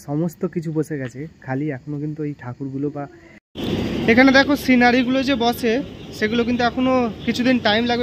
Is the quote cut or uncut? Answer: cut